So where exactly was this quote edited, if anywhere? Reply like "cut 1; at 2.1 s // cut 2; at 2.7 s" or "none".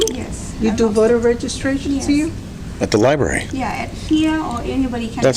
none